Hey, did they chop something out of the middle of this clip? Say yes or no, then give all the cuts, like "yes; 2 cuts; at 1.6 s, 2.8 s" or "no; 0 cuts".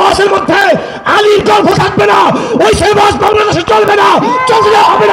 no; 0 cuts